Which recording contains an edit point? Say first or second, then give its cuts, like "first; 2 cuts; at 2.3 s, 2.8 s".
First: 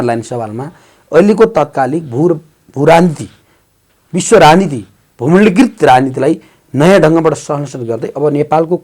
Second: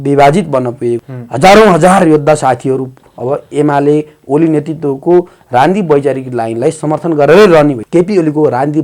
second; 2 cuts; at 1.0 s, 7.8 s